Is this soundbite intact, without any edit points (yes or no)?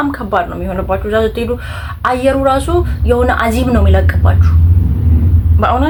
yes